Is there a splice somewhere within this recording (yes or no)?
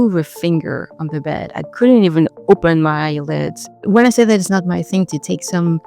yes